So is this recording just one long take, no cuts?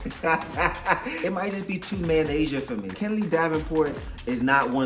no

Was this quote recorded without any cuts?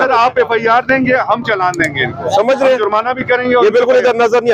yes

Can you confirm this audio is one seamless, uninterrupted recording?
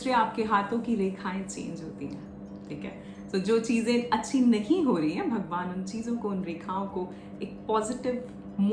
yes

